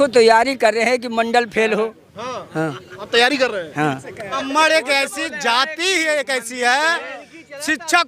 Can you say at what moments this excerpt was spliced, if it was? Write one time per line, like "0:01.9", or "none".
0:04.4